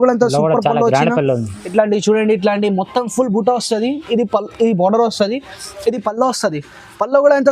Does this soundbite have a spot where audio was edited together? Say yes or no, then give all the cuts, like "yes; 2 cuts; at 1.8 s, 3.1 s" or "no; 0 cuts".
yes; 1 cut; at 1.6 s